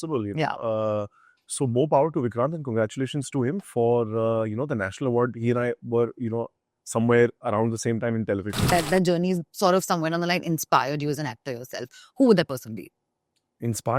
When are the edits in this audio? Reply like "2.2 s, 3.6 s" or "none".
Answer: 8.7 s